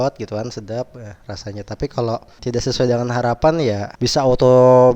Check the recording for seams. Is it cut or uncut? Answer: cut